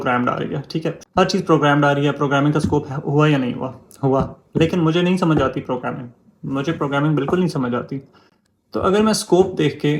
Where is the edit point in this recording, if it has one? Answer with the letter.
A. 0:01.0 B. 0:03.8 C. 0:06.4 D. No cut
A